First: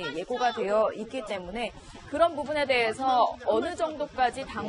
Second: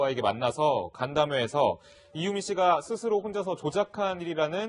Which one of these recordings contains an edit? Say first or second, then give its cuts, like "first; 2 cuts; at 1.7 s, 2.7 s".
second; 1 cut; at 0.9 s